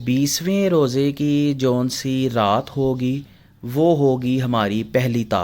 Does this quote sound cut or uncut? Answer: uncut